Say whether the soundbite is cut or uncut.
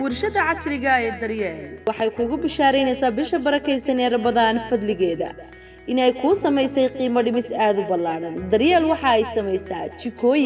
uncut